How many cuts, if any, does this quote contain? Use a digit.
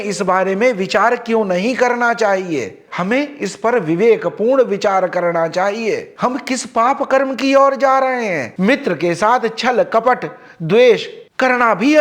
2